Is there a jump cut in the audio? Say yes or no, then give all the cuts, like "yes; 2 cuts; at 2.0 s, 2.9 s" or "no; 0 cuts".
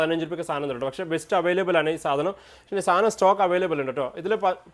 no; 0 cuts